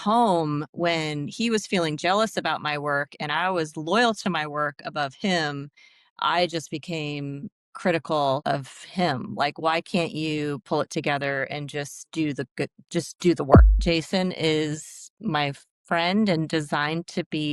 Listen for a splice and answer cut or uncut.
cut